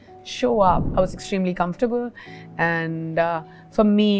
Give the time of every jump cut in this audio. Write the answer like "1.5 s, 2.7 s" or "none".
0.9 s